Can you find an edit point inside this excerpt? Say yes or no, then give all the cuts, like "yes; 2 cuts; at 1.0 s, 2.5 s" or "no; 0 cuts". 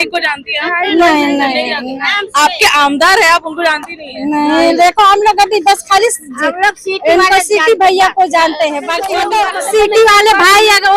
yes; 1 cut; at 9.1 s